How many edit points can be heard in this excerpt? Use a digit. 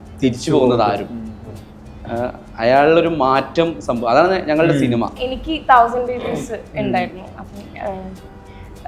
1